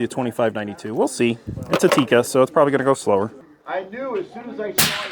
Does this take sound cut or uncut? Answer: cut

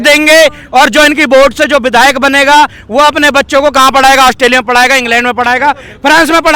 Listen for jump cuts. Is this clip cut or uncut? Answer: uncut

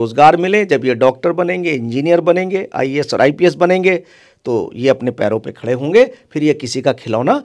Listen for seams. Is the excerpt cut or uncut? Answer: uncut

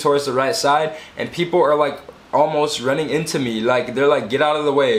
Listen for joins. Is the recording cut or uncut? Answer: uncut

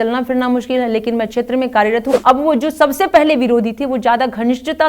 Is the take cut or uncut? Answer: cut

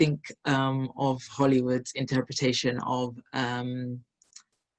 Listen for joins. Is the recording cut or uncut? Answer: uncut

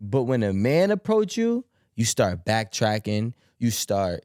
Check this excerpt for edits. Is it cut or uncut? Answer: uncut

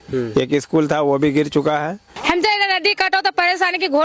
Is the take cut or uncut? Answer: cut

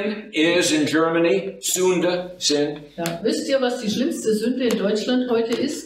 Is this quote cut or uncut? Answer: uncut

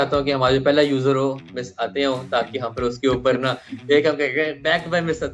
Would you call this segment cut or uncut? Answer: uncut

